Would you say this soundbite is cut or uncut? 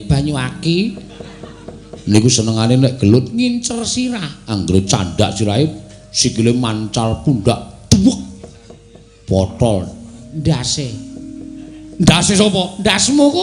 uncut